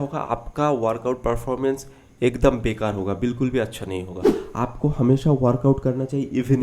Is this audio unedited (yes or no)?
yes